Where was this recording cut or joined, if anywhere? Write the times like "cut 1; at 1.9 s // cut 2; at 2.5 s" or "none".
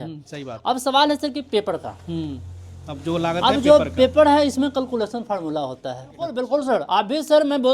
cut 1; at 6.3 s